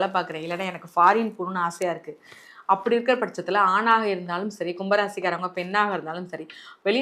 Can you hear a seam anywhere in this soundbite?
no; 0 cuts

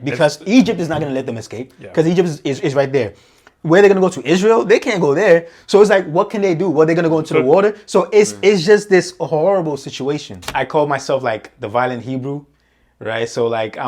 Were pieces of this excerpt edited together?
yes; 1 cut; at 10.4 s

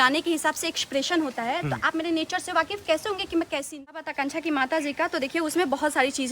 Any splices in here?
yes; 1 cut; at 4.0 s

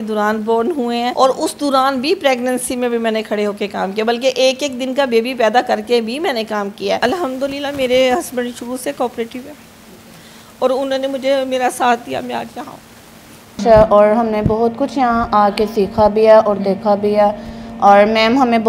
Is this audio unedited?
no; 3 cuts; at 1.1 s, 7.0 s, 13.6 s

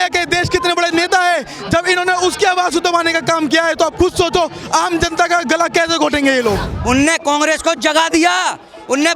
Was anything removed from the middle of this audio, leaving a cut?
yes; 1 cut; at 6.6 s

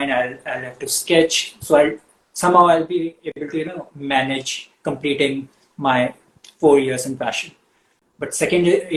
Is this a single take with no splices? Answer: yes; 0 cuts

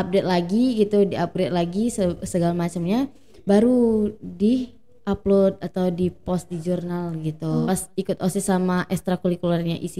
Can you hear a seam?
yes; 1 cut; at 7.7 s

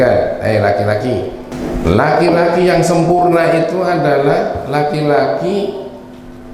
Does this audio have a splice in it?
yes; 1 cut; at 1.5 s

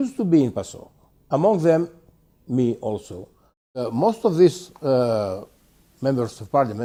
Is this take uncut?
yes; 0 cuts

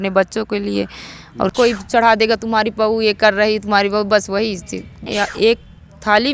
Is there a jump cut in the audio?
yes; 2 cuts; at 1.5 s, 5.1 s

